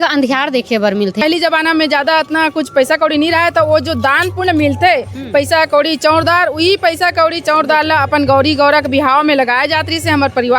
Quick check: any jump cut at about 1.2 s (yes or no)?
yes